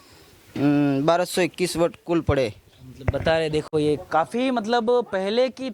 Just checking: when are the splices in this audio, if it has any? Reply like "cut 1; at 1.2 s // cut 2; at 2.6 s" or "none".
none